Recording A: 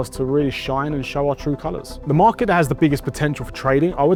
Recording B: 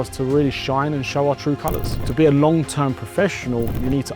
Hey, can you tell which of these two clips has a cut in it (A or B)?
B